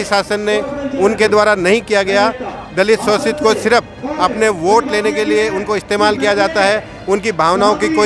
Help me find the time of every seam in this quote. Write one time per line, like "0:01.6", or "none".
none